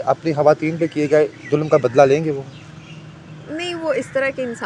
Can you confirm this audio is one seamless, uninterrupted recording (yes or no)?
yes